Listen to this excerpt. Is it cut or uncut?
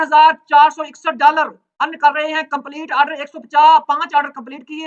uncut